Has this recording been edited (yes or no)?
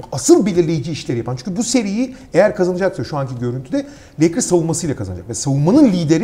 no